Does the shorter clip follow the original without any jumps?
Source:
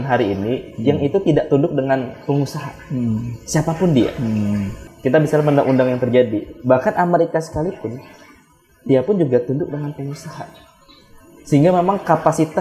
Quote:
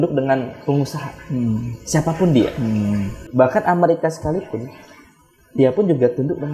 no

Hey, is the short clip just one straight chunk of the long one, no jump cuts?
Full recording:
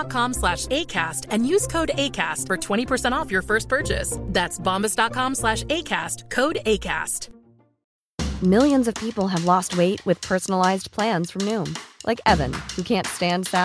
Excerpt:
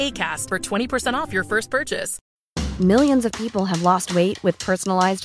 no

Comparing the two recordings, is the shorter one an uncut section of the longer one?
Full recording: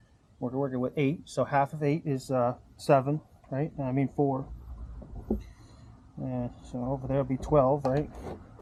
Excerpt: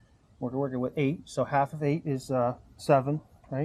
yes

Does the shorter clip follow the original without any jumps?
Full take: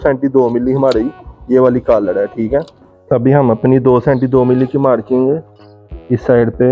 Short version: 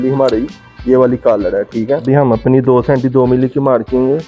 no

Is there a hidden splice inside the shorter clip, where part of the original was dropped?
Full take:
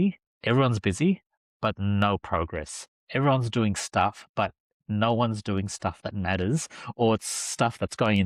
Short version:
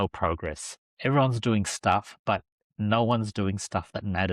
no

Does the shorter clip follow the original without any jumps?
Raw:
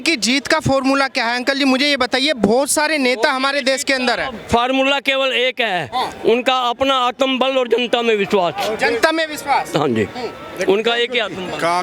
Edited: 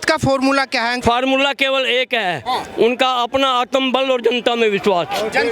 no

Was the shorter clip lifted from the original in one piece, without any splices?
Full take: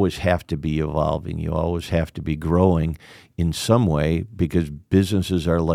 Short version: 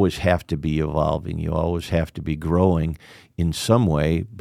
yes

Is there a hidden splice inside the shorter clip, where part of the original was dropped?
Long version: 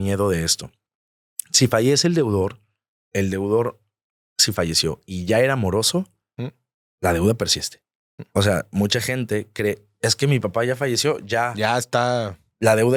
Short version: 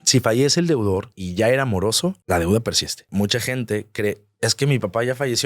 yes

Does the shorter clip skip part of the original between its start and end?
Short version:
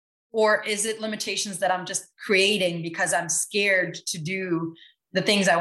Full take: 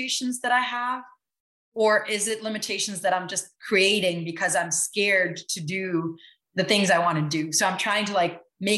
no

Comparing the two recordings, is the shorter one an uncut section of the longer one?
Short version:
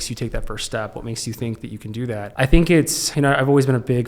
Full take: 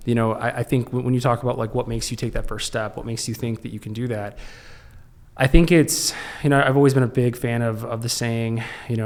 no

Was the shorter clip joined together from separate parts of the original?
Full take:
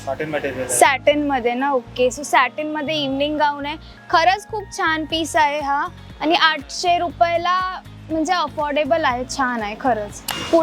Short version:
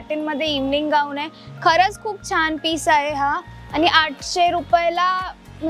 no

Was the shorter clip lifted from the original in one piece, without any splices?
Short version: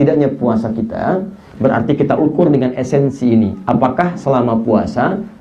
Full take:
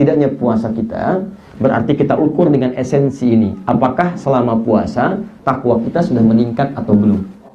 yes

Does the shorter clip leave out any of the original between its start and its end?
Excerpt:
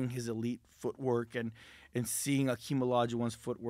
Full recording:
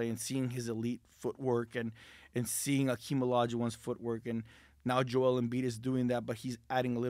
no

